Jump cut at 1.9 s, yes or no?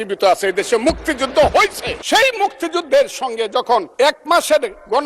yes